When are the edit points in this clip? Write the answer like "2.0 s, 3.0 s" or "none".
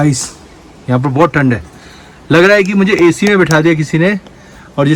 none